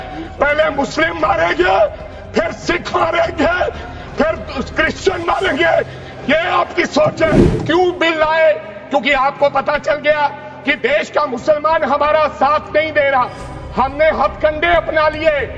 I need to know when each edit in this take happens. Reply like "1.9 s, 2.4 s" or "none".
7.5 s